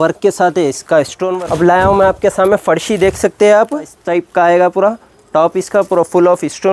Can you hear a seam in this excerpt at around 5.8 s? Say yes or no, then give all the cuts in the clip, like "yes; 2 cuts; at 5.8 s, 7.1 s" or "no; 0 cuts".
no; 2 cuts; at 1.2 s, 4.0 s